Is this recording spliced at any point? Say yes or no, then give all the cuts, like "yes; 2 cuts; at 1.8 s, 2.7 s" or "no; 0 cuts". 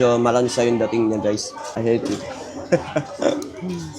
yes; 1 cut; at 1.6 s